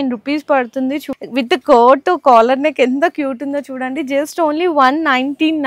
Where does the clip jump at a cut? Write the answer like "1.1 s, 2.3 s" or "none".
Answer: 1.1 s